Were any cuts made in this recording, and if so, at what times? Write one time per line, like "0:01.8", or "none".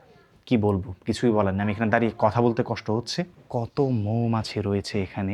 0:03.4